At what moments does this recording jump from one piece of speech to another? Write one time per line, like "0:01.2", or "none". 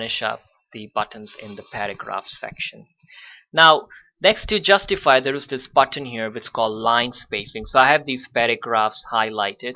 0:04.3